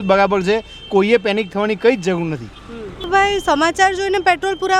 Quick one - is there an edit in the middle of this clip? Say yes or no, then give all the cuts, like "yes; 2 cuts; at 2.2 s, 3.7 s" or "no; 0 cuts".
yes; 1 cut; at 3.1 s